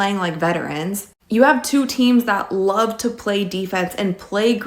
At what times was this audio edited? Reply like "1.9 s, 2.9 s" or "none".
1.6 s